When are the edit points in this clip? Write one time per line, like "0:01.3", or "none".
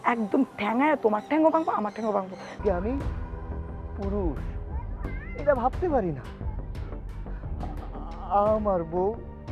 0:02.6